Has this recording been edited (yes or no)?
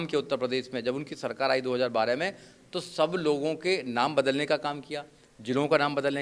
no